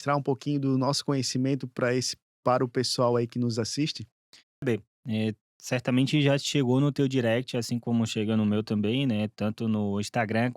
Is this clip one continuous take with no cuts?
no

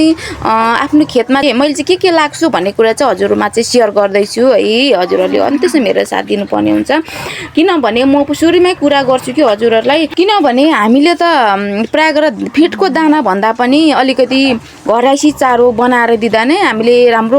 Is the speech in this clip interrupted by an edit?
yes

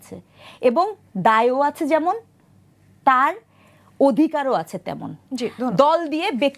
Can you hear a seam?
no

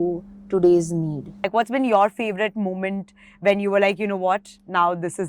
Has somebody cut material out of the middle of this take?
yes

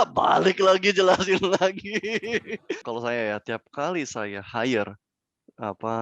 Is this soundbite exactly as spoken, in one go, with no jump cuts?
no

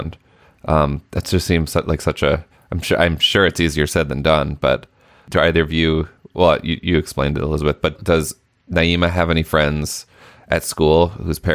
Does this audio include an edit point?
yes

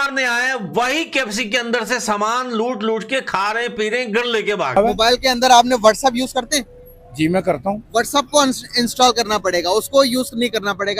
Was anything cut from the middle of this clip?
yes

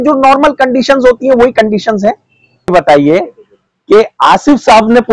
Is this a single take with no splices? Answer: no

